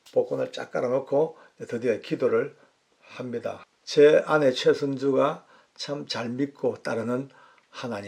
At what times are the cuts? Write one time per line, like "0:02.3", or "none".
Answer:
0:03.6